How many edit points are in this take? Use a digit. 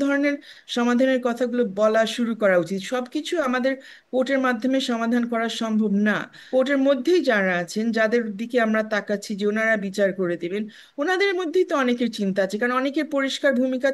1